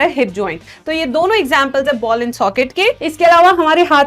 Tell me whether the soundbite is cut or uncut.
cut